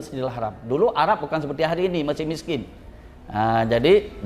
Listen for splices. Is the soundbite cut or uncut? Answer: uncut